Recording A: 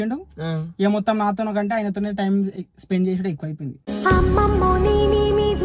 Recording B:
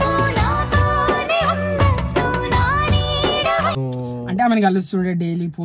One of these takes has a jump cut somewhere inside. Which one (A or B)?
B